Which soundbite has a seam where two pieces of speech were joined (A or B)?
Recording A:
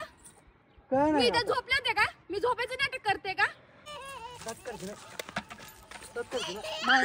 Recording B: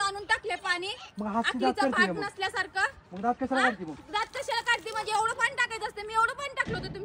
A